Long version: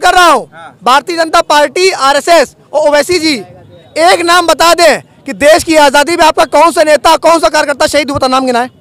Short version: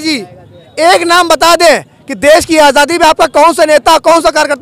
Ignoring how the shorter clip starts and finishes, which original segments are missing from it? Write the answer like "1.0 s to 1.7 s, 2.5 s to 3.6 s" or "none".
none